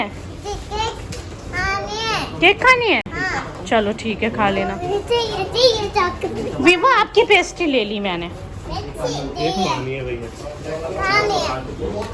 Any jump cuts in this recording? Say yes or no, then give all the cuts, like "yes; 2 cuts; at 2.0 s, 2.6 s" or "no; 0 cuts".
no; 0 cuts